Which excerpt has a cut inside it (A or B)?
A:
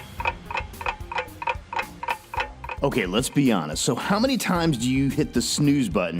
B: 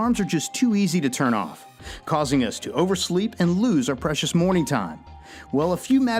A